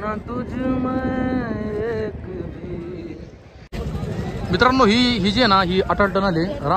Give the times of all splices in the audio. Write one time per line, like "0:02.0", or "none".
0:03.7